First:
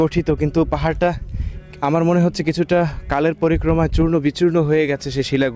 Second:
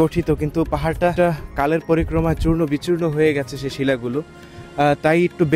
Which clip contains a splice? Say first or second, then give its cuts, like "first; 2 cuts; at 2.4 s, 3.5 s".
second; 1 cut; at 1.1 s